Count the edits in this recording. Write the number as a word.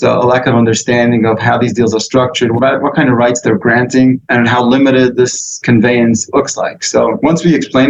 five